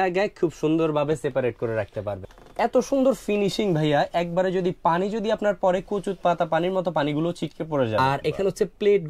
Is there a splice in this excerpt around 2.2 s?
yes; 2 cuts; at 2.2 s, 8.0 s

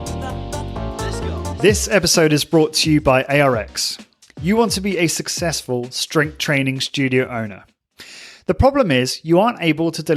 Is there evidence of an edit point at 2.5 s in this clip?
no; 1 cut; at 0.9 s

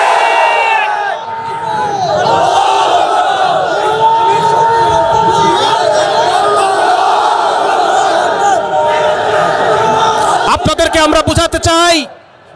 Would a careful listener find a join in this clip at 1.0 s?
no; 0 cuts

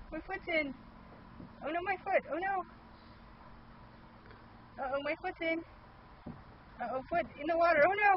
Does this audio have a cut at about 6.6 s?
no; 1 cut; at 2.5 s

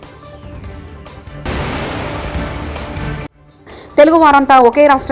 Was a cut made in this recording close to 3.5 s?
yes; 2 cuts; at 1.2 s, 3.5 s

